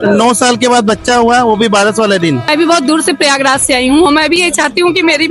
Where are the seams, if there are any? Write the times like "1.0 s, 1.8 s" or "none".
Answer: 2.5 s